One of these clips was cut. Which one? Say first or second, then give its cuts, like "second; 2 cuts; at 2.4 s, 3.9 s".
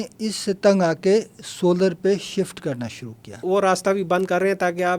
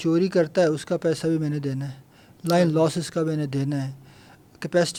first; 1 cut; at 3.4 s